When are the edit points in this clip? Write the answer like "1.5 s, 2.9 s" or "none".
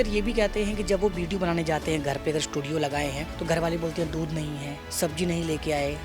3.3 s, 4.8 s